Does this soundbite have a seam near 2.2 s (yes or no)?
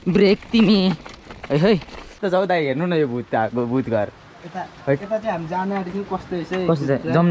yes